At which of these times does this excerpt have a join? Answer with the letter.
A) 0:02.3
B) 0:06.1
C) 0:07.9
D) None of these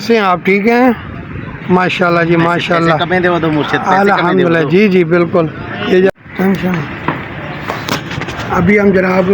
B